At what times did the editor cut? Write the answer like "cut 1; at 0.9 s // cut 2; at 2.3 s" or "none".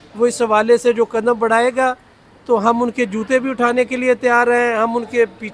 none